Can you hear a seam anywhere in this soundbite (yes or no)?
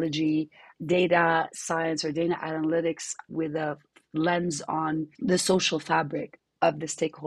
yes